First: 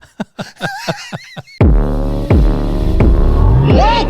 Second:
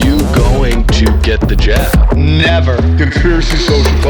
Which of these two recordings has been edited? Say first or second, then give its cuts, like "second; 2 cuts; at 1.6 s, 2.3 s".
first; 1 cut; at 1.5 s